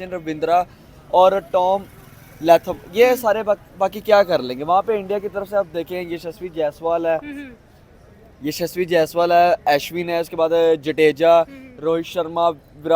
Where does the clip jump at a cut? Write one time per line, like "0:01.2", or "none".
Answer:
none